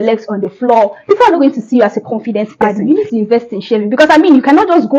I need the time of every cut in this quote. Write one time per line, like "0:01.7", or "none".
0:02.9